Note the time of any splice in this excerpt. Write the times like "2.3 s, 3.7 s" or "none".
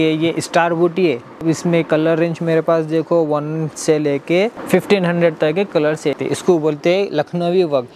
1.4 s, 4.6 s, 6.1 s